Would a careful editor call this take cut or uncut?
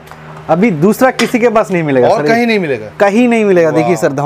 uncut